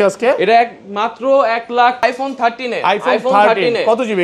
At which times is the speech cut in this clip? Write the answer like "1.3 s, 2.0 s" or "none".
2.0 s